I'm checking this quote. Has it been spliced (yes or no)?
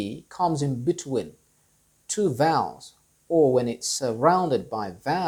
no